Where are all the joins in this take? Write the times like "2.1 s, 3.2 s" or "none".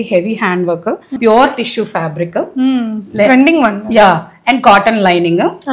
1.1 s